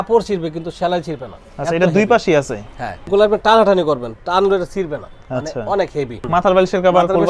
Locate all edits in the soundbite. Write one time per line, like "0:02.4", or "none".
0:03.0
0:06.2